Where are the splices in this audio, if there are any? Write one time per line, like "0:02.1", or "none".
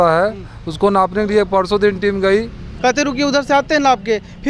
0:02.7